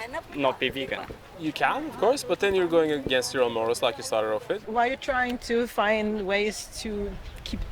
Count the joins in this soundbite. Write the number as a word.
two